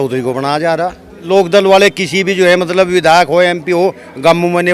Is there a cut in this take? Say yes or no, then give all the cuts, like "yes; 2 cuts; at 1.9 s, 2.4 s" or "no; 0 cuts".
yes; 1 cut; at 1.1 s